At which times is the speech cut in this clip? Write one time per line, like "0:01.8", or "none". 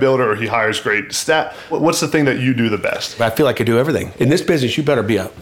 0:01.7
0:03.2
0:04.1